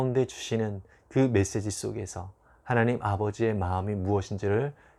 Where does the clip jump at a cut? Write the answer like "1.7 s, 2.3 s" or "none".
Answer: none